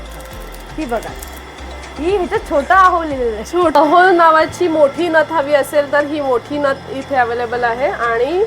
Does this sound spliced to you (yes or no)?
yes